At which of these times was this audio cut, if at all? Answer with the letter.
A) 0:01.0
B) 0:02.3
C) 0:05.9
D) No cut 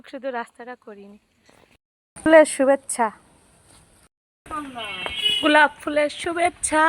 B